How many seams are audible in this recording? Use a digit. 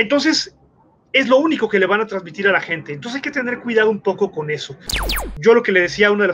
1